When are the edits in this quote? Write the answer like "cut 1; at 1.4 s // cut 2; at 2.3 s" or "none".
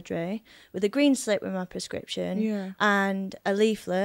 none